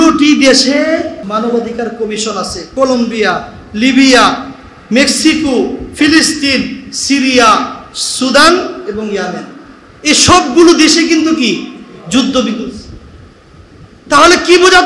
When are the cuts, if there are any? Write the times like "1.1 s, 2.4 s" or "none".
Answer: 1.2 s, 2.6 s